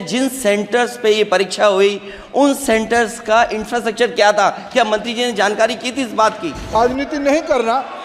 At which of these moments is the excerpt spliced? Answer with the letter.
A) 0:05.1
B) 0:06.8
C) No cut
B